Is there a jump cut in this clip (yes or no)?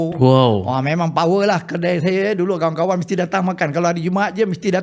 no